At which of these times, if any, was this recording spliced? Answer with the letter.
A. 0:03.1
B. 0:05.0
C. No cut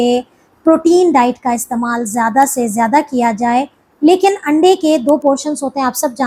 C